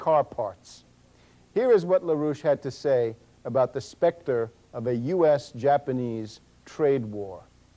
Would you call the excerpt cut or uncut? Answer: cut